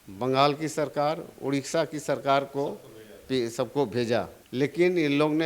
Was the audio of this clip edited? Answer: yes; 1 cut; at 4.4 s

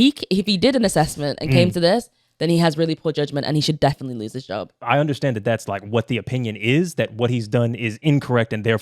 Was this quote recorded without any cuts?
no; 1 cut; at 4.7 s

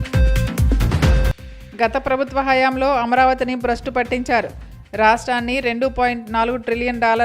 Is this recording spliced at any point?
yes; 1 cut; at 1.0 s

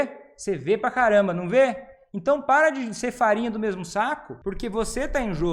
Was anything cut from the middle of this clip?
yes; 1 cut; at 4.3 s

